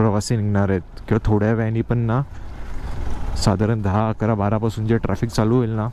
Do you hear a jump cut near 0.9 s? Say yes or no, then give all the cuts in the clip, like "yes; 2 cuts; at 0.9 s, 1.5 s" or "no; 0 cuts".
no; 0 cuts